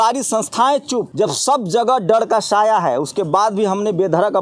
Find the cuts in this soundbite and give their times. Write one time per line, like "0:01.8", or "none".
0:01.1